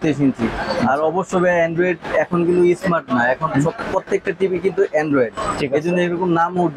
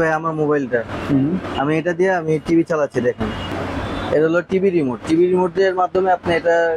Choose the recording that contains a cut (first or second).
second